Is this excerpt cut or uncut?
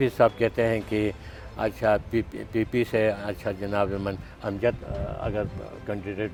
uncut